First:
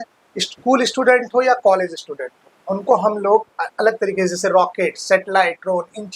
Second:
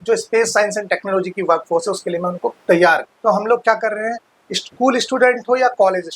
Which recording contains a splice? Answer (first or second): second